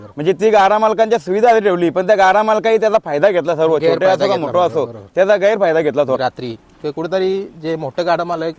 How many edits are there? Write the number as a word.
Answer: one